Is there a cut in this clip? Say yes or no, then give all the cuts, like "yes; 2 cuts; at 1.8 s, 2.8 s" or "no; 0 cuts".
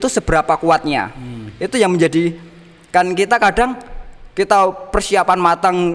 no; 0 cuts